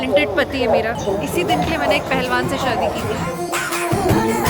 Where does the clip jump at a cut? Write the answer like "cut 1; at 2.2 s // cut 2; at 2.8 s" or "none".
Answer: cut 1; at 0.9 s